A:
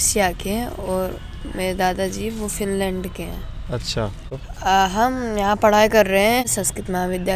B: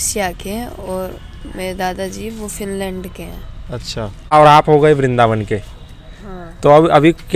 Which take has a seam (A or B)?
A